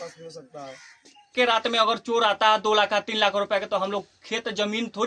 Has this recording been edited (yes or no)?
yes